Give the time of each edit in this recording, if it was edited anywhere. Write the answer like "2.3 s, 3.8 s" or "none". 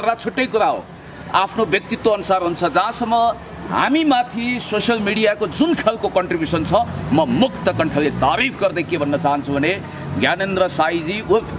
none